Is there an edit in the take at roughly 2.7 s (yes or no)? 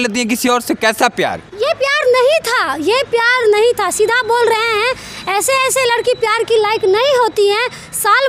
no